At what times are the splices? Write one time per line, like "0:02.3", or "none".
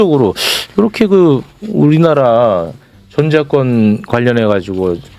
none